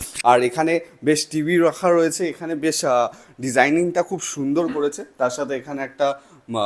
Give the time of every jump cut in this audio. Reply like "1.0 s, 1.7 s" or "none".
none